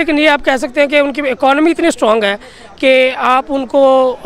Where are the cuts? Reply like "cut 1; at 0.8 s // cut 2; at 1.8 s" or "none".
none